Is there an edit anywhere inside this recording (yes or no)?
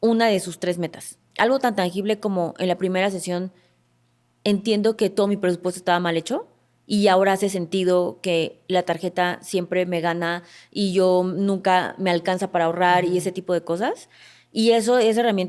yes